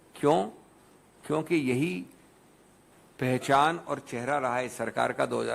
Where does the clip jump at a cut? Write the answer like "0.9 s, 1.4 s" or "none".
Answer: none